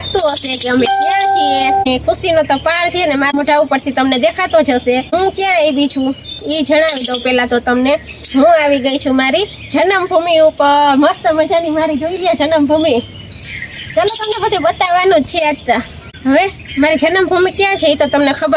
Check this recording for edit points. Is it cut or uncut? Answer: uncut